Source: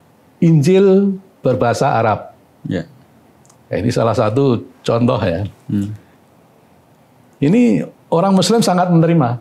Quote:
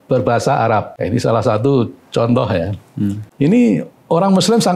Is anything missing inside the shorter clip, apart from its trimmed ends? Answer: yes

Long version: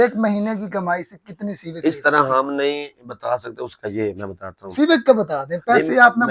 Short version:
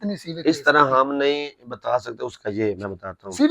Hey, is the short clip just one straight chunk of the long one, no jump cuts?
yes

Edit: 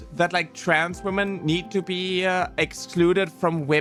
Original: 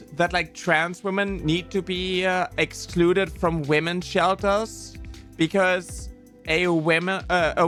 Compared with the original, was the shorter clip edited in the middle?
no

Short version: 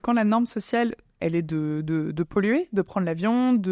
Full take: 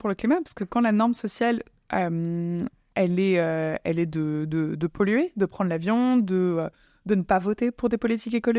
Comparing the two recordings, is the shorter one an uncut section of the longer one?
no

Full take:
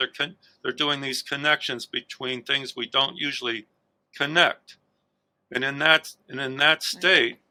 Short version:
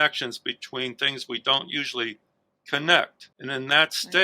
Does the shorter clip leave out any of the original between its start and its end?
yes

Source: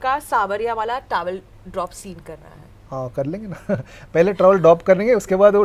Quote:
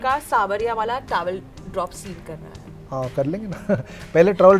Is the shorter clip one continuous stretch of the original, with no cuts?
yes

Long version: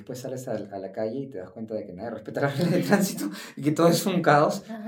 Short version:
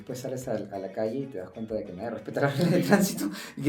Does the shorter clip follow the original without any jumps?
yes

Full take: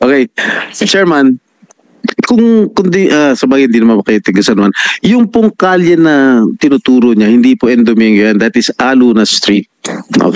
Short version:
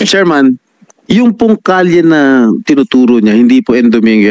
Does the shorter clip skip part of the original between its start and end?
yes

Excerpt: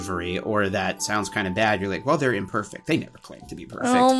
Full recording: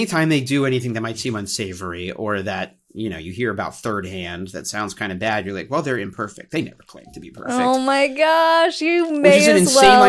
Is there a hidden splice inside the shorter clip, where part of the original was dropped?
yes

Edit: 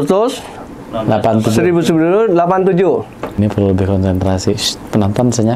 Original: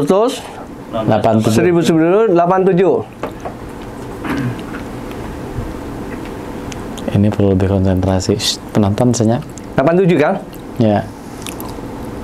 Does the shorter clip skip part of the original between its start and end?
yes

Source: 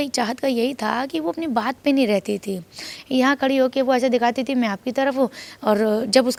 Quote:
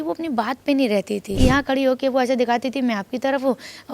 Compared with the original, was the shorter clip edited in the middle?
yes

